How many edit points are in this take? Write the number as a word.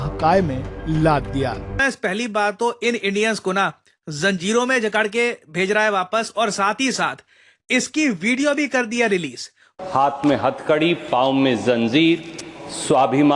two